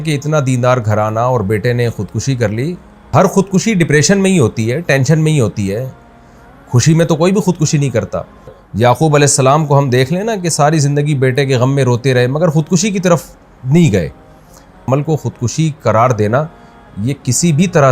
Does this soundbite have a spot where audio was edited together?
yes; 3 cuts; at 3.1 s, 8.6 s, 14.8 s

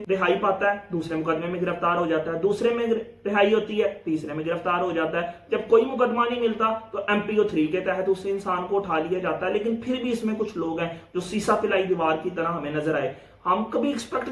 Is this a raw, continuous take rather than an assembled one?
yes; 0 cuts

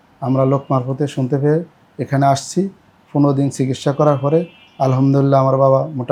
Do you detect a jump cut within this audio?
no; 0 cuts

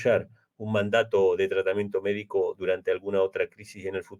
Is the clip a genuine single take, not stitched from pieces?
yes; 0 cuts

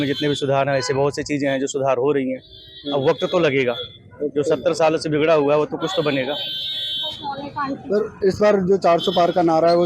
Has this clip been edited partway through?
no; 0 cuts

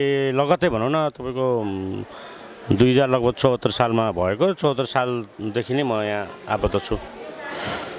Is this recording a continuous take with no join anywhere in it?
yes; 0 cuts

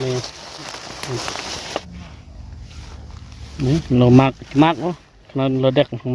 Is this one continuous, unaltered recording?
no; 1 cut; at 1.8 s

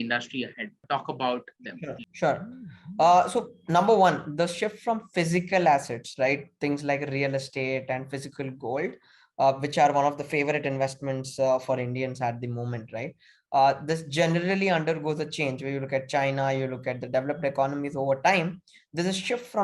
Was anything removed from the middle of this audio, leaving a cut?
yes; 2 cuts; at 0.8 s, 2.1 s

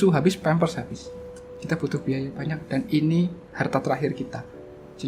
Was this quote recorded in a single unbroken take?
yes; 0 cuts

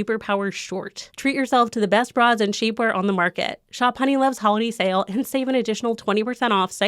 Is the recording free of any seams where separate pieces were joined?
no; 1 cut; at 1.1 s

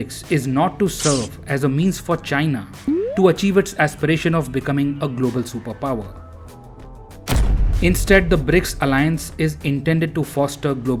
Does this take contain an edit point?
no; 0 cuts

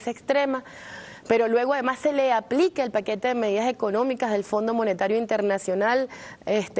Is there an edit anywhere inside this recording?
yes; 1 cut; at 4.8 s

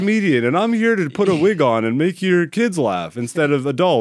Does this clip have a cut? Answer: no; 0 cuts

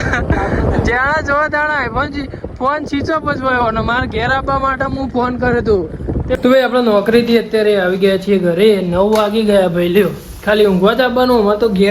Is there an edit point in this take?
yes; 1 cut; at 6.4 s

